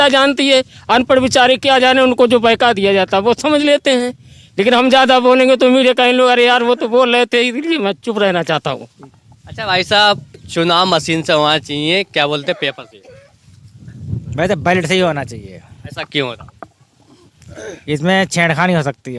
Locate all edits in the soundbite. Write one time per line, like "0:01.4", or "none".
none